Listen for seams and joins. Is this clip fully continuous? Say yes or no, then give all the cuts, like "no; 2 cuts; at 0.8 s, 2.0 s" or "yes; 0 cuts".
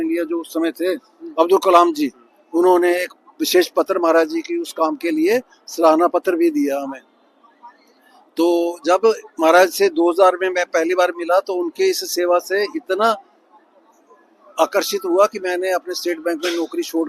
yes; 0 cuts